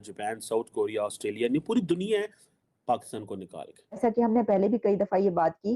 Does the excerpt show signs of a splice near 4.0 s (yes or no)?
yes